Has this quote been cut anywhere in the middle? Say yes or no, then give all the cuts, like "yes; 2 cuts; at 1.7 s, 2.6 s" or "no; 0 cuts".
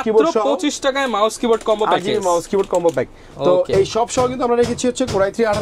no; 0 cuts